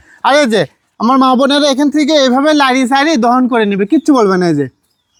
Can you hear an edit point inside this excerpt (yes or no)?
no